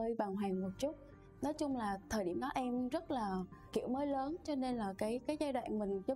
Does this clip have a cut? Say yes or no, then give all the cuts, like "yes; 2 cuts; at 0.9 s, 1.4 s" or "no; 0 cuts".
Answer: no; 0 cuts